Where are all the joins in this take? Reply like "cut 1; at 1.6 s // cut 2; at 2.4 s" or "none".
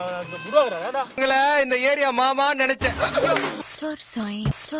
cut 1; at 3.6 s